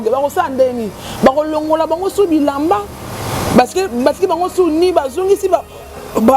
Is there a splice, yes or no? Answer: no